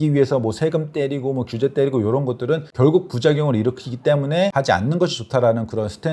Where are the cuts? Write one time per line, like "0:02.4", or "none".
0:02.7
0:04.5